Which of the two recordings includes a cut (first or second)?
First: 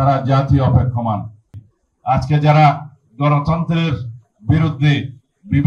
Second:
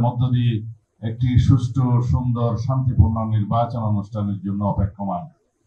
first